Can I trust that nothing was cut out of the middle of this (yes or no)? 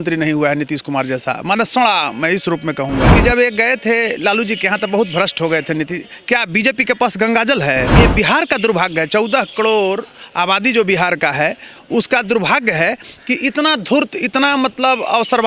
no